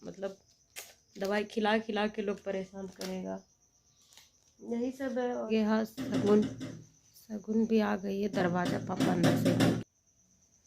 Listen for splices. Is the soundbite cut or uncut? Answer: cut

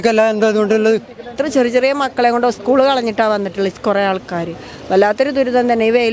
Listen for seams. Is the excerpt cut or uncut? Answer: cut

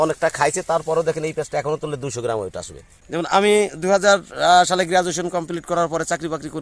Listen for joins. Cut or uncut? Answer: cut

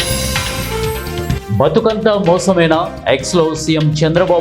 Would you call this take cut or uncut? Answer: cut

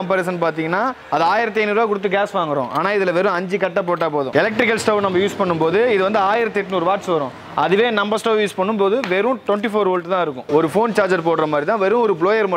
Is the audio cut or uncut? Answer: uncut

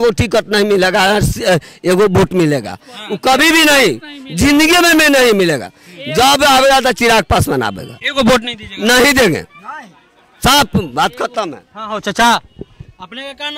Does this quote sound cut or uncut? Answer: uncut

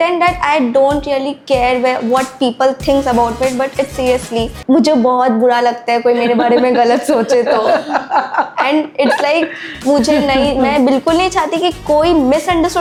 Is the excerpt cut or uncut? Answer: uncut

